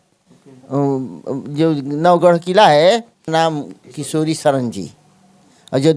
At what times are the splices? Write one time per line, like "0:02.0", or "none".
0:03.3